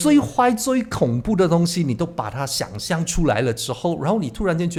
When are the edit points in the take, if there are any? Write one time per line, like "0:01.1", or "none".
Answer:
none